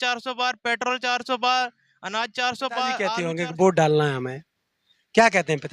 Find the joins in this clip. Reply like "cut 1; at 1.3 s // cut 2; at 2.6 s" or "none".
cut 1; at 3.2 s